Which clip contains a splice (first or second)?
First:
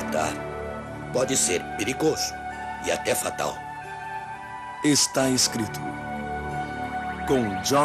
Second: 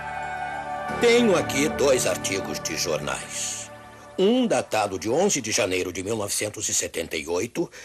second